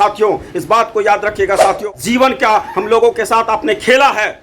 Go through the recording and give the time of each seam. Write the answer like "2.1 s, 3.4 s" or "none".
1.8 s